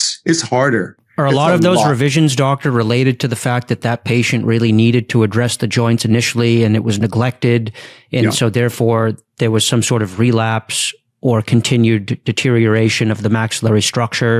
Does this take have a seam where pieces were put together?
no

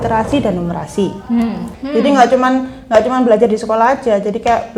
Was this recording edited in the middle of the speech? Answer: yes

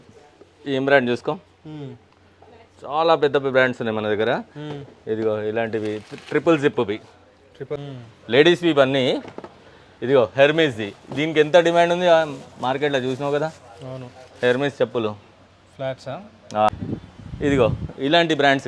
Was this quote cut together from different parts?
yes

